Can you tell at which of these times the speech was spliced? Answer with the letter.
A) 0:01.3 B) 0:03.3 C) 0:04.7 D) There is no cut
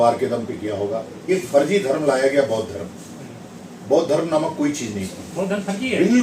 A